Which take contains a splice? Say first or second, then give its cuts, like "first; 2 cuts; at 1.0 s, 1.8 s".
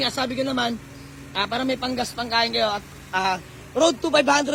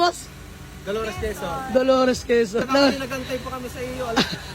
second; 1 cut; at 2.7 s